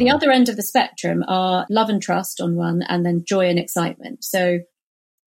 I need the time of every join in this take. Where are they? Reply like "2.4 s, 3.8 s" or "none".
1.6 s